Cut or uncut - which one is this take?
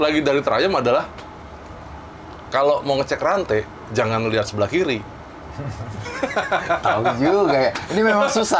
uncut